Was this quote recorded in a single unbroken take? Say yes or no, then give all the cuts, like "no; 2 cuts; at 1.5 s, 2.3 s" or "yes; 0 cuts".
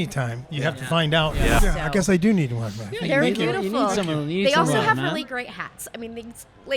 no; 1 cut; at 1.6 s